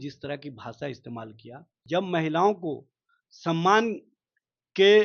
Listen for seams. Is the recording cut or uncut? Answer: cut